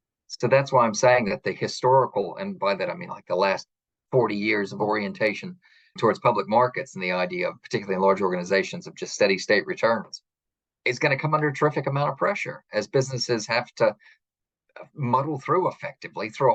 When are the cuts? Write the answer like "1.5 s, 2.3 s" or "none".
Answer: none